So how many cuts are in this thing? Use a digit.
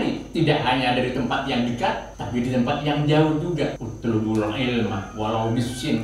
2